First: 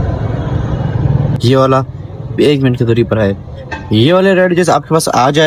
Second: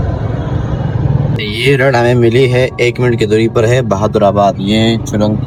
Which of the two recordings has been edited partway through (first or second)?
first